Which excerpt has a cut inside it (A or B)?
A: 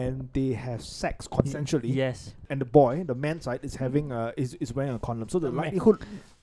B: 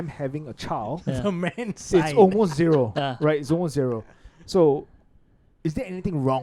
A